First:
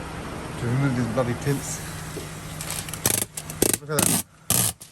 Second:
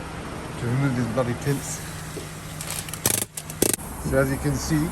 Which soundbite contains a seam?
second; 1 cut; at 3.8 s

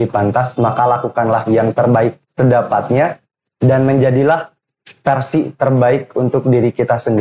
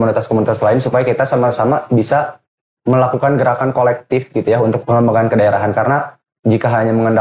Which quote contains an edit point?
second; 1 cut; at 4.8 s

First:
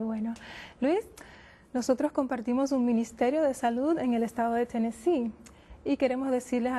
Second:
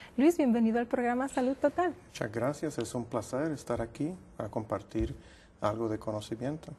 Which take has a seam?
first; 1 cut; at 1.7 s

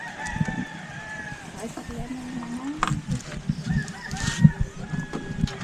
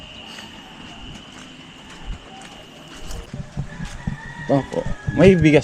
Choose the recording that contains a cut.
second; 1 cut; at 3.3 s

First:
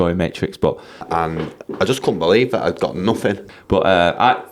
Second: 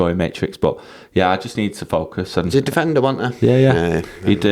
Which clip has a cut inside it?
first; 2 cuts; at 1.0 s, 3.5 s

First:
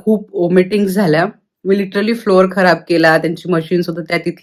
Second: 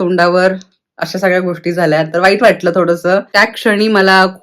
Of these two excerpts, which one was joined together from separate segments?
second; 1 cut; at 3.3 s

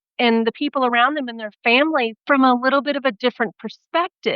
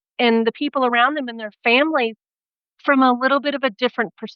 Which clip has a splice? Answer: first; 1 cut; at 2.2 s

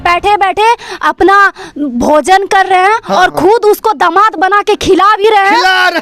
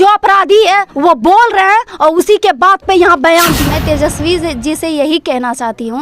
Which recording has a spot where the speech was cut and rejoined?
second; 1 cut; at 3.6 s

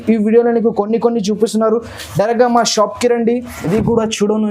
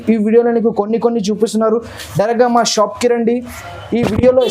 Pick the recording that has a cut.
first; 1 cut; at 3.5 s

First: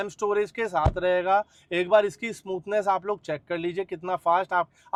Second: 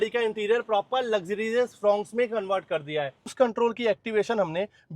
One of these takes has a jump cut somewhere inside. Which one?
second; 1 cut; at 3.3 s

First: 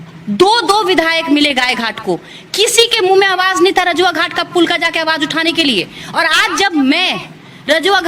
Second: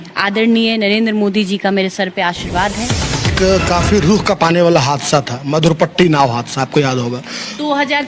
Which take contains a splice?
second; 1 cut; at 3.3 s

